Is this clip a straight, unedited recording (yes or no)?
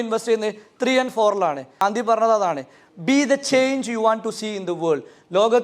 no